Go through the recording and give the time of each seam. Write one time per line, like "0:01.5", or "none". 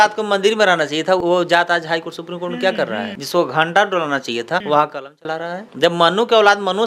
0:01.2
0:03.2
0:04.6
0:05.6